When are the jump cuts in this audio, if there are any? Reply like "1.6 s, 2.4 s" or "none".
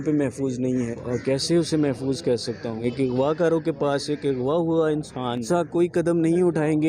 0.9 s, 2.8 s, 5.4 s